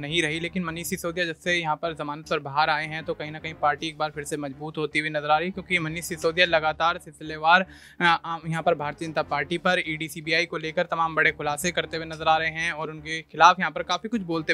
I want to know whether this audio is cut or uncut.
uncut